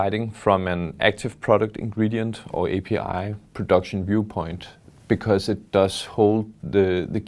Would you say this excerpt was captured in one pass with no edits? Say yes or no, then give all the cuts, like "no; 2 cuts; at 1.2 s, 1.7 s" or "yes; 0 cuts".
yes; 0 cuts